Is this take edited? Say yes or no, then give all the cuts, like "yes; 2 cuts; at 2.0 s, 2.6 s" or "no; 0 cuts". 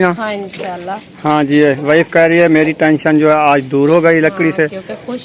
no; 0 cuts